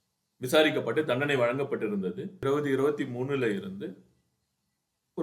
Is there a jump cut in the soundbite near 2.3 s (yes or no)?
yes